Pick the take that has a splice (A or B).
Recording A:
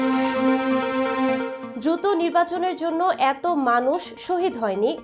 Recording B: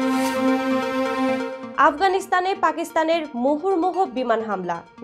B